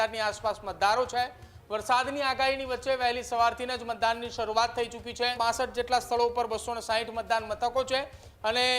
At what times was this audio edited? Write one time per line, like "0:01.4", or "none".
0:05.4